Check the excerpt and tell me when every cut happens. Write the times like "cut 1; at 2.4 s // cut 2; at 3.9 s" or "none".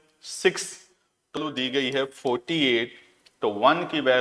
cut 1; at 1.4 s